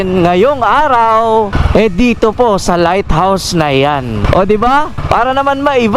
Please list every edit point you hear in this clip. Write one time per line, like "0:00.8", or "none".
0:01.6
0:04.2
0:05.0